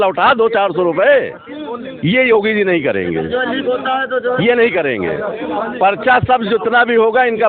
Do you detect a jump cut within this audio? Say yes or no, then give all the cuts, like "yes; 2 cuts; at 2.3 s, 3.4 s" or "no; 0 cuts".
no; 0 cuts